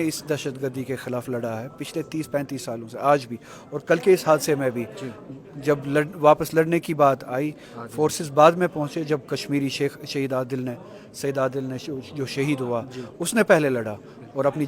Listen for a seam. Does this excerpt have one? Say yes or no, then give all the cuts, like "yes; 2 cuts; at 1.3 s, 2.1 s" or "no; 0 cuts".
no; 0 cuts